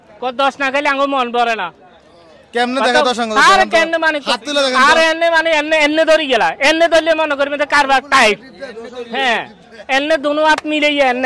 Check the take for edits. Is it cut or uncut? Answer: uncut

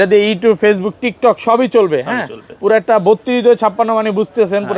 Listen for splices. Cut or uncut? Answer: uncut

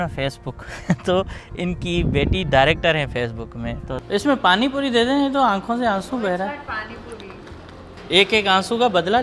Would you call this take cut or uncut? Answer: cut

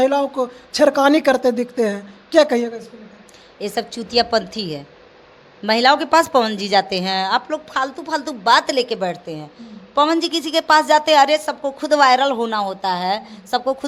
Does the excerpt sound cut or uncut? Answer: uncut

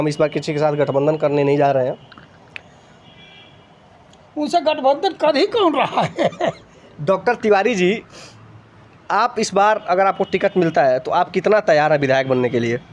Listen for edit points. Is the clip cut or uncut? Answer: uncut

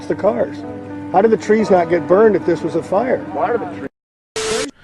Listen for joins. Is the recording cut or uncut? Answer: cut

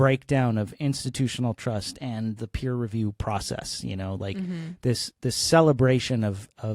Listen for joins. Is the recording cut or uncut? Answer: uncut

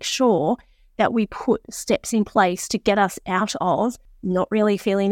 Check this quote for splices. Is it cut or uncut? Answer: cut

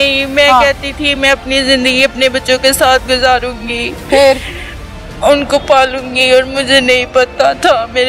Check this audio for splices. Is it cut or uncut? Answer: uncut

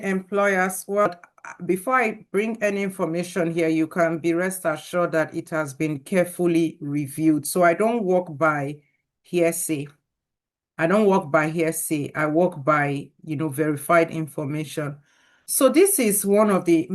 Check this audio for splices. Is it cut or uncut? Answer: cut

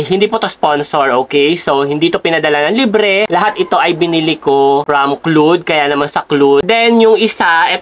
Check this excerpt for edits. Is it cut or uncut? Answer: cut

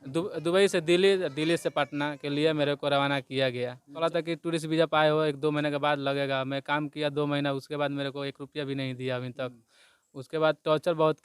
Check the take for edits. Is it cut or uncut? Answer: cut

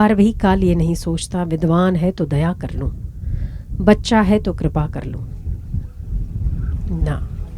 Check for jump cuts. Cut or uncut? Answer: uncut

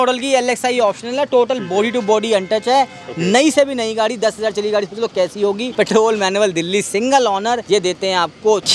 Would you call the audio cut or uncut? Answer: uncut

